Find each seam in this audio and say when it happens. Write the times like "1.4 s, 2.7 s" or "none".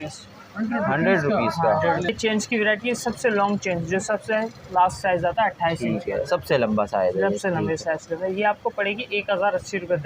2.1 s